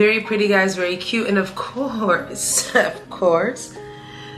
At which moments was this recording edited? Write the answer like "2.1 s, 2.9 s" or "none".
none